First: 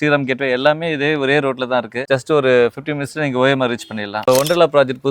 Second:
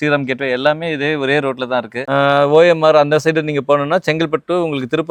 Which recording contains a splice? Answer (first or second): first